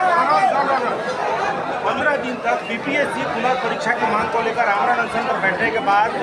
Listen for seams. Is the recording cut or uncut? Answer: uncut